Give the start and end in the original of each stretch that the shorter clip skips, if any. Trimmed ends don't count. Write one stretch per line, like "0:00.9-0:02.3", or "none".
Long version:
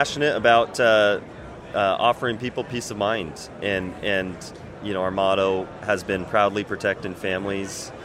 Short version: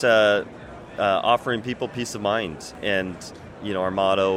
0:03.5-0:03.9